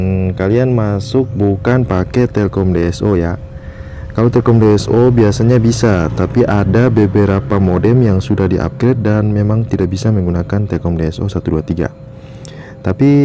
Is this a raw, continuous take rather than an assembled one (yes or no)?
yes